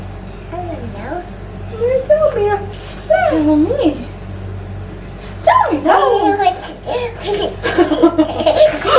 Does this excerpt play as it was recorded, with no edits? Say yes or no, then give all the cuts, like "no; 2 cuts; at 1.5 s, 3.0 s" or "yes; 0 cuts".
yes; 0 cuts